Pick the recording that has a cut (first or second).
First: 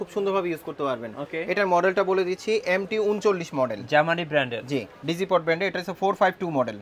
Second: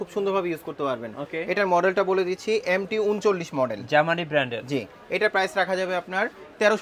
first